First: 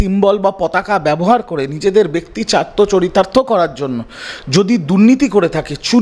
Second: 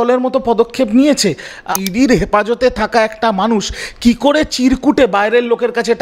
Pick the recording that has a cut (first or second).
second